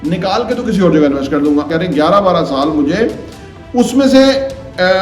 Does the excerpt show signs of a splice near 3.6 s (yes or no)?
no